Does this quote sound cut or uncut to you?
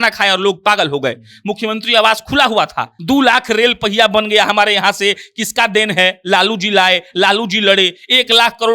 cut